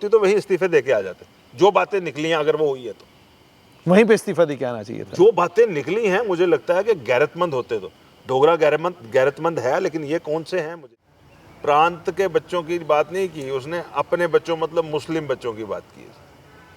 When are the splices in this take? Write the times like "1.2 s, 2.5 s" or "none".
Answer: 10.8 s